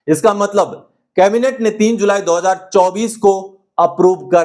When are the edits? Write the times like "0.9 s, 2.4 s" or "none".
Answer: none